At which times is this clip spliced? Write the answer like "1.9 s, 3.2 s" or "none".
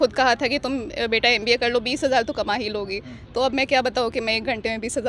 none